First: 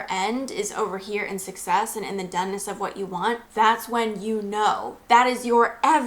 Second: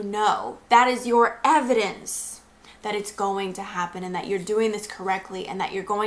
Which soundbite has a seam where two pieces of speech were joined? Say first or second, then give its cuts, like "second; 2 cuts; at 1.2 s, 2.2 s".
first; 1 cut; at 3.5 s